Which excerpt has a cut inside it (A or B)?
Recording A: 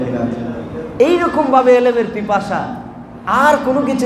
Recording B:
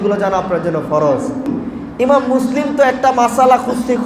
B